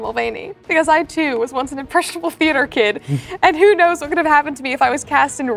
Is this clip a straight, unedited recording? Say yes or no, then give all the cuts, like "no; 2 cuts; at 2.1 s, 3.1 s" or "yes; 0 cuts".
yes; 0 cuts